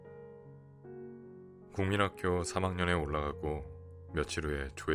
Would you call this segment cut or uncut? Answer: cut